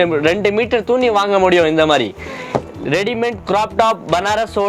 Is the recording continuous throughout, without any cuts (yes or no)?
yes